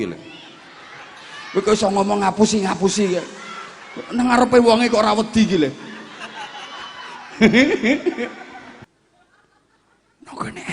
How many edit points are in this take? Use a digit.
1